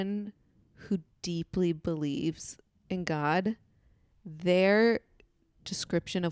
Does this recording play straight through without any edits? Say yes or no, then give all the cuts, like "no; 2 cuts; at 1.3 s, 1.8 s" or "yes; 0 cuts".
yes; 0 cuts